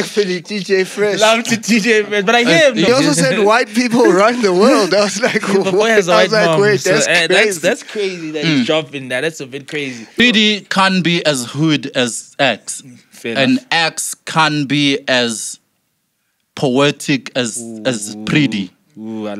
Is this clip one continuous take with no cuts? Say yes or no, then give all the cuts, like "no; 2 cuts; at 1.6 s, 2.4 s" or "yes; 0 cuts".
no; 2 cuts; at 2.9 s, 10.2 s